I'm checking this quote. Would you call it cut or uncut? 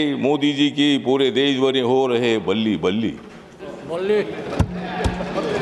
uncut